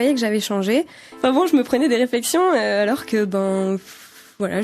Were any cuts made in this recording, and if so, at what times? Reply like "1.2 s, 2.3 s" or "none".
1.0 s